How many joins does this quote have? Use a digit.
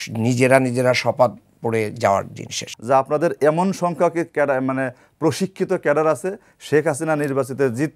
1